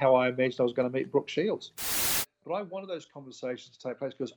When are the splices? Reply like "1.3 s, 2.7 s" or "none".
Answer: 2.0 s